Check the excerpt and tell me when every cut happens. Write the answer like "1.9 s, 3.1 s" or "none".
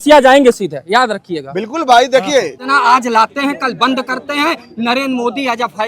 2.6 s